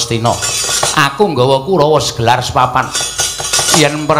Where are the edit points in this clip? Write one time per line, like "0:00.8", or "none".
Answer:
none